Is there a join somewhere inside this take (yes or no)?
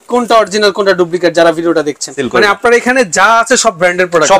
yes